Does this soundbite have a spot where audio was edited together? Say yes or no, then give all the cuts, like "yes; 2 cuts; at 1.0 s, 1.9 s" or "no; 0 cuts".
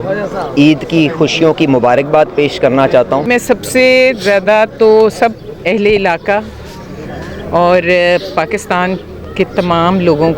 yes; 1 cut; at 3.2 s